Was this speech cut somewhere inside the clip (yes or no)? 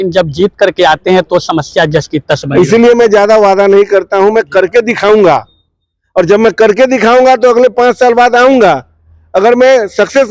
no